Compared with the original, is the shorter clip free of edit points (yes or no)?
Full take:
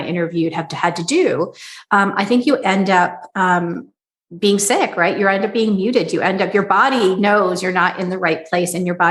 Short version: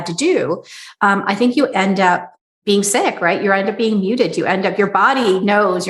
no